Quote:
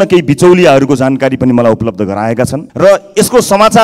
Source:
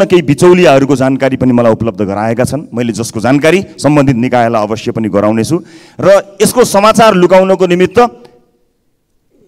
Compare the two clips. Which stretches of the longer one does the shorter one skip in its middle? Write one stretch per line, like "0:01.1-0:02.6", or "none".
0:02.6-0:05.9